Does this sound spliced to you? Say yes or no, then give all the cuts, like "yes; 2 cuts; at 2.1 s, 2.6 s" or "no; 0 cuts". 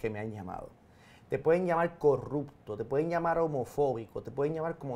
no; 0 cuts